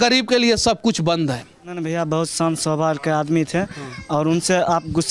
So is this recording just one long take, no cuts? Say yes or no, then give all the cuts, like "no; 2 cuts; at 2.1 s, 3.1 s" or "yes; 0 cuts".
no; 1 cut; at 1.9 s